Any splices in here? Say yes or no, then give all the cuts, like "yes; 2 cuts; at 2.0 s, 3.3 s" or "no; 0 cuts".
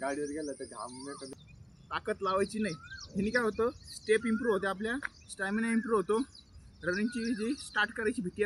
yes; 1 cut; at 1.4 s